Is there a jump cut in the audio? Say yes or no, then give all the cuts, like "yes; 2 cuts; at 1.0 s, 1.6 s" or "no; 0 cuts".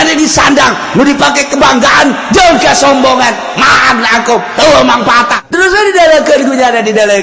yes; 1 cut; at 5.4 s